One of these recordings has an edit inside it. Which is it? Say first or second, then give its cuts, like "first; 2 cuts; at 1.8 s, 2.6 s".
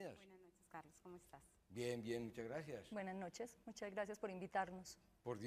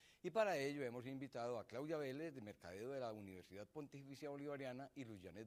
second; 1 cut; at 1.5 s